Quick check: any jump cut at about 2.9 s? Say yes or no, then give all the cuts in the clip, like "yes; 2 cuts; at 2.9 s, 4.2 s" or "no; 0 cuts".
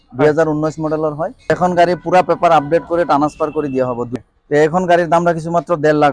no; 2 cuts; at 1.5 s, 4.1 s